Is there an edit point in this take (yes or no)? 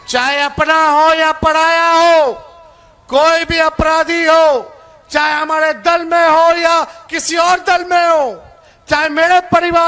no